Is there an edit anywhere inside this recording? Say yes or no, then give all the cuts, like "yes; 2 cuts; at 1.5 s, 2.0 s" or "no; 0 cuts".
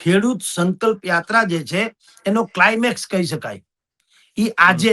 no; 0 cuts